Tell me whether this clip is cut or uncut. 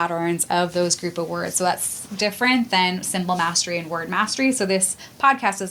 uncut